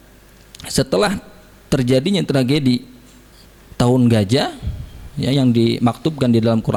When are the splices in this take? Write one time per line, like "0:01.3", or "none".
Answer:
none